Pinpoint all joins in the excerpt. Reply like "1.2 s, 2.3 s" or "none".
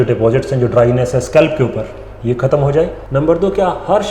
3.0 s